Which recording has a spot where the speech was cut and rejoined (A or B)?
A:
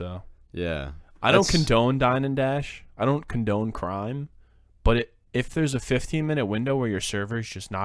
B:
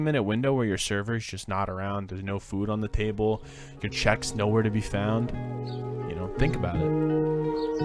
B